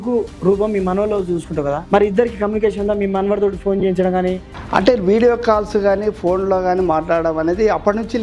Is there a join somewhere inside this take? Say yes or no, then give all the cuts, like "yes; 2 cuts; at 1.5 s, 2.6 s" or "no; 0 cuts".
yes; 2 cuts; at 1.8 s, 4.5 s